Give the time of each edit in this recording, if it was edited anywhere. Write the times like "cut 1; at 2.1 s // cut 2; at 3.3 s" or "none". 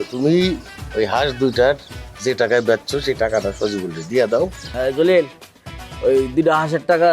cut 1; at 4.6 s